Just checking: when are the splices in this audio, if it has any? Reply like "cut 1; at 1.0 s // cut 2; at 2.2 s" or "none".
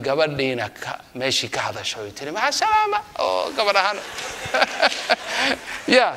none